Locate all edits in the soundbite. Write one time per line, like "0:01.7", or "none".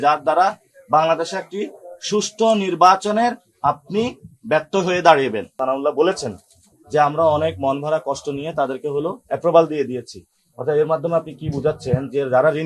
0:05.5